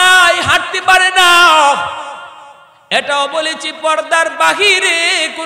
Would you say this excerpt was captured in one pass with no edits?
yes; 0 cuts

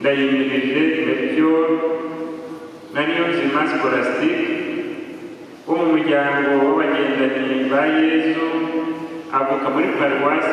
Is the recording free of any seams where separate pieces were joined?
yes; 0 cuts

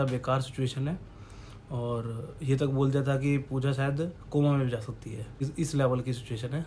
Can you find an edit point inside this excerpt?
yes; 1 cut; at 5.5 s

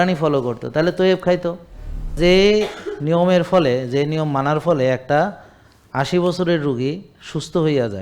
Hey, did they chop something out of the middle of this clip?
yes; 1 cut; at 2.1 s

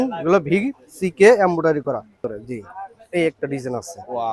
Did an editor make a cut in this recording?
yes; 1 cut; at 2.2 s

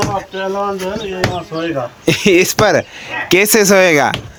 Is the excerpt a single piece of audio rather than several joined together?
yes; 0 cuts

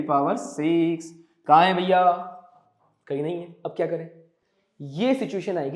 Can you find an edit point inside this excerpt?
no; 0 cuts

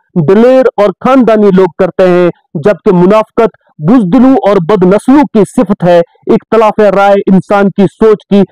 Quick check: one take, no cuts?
yes; 0 cuts

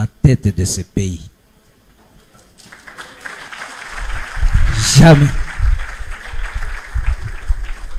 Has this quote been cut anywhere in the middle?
no; 0 cuts

